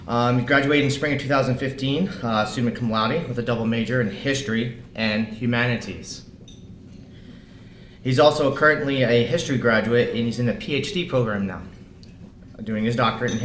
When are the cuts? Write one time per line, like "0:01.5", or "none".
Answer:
0:08.2